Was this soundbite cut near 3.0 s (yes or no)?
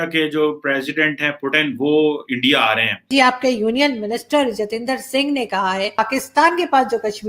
yes